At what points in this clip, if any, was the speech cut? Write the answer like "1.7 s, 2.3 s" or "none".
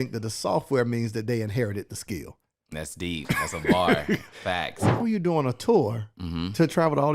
2.7 s, 4.9 s